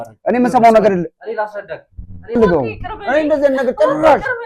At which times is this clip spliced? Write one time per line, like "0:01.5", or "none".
0:02.4

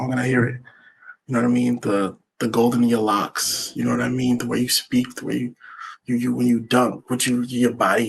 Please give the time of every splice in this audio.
none

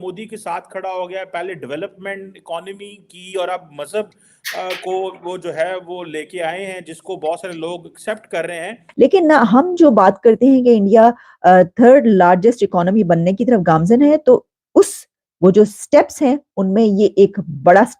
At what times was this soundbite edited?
0:08.8

